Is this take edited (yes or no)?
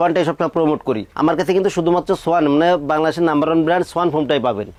no